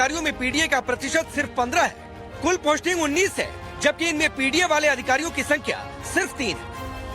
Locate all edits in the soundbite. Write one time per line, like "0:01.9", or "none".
0:05.4